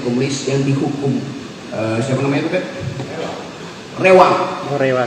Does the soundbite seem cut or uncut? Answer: cut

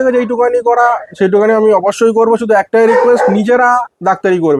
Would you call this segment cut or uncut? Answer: uncut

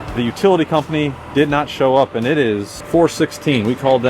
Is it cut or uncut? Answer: uncut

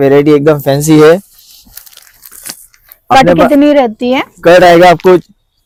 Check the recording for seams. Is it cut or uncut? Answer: uncut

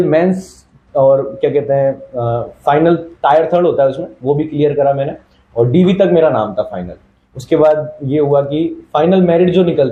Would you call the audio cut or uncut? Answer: uncut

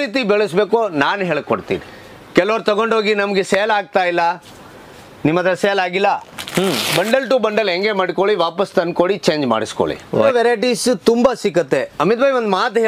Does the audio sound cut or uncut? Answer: cut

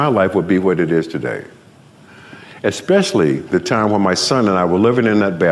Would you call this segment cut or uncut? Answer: uncut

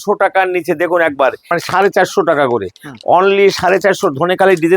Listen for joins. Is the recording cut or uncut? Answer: cut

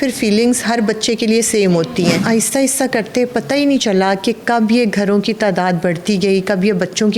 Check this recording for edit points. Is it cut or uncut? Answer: cut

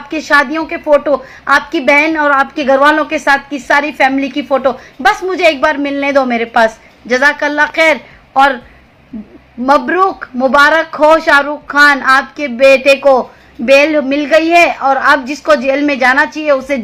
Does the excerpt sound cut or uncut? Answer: uncut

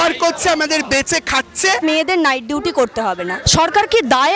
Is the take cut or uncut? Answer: cut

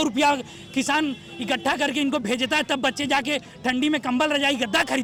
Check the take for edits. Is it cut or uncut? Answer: uncut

